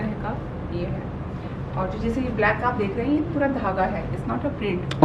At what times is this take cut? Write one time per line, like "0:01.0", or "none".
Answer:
none